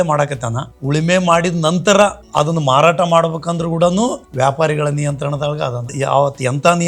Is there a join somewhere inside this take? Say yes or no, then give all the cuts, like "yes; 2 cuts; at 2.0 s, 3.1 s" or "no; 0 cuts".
yes; 1 cut; at 5.9 s